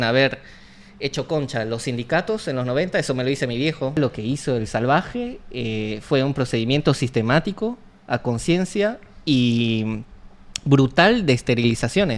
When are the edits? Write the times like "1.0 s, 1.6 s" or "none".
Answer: 4.0 s